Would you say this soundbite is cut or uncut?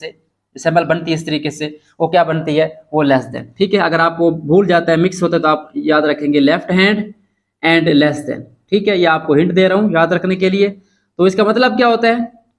uncut